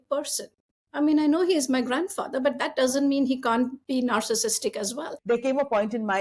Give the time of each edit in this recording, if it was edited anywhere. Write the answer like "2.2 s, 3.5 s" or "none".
3.8 s, 5.1 s